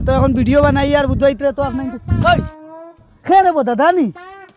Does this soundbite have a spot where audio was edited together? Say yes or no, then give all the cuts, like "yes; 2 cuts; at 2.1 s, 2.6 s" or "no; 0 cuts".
no; 0 cuts